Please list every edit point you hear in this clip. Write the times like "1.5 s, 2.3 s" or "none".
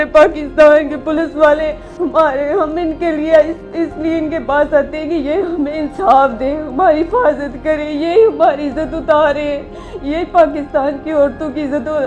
1.8 s